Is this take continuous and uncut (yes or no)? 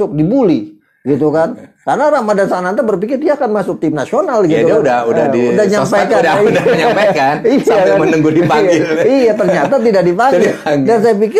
yes